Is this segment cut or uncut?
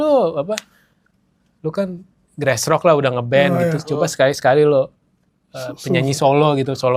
uncut